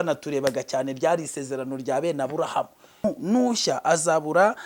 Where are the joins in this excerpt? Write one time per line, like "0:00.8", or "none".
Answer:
0:03.0